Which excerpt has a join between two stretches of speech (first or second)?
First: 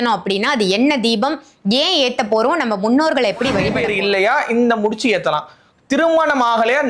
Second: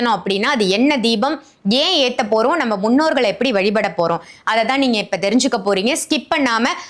first